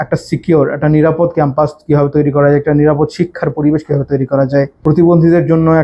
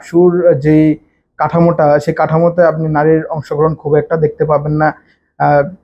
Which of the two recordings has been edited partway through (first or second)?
first